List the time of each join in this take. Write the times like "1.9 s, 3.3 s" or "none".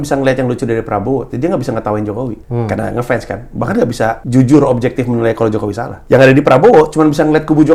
2.4 s, 4.2 s, 5.9 s